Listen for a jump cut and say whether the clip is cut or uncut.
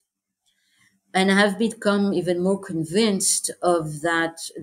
uncut